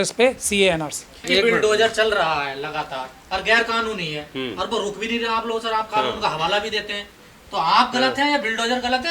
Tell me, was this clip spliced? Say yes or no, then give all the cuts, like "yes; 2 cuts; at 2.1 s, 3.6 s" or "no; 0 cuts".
yes; 1 cut; at 1.2 s